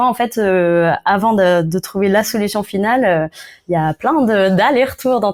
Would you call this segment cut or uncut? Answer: uncut